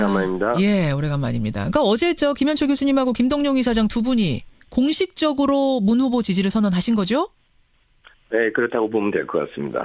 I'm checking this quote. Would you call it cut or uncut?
cut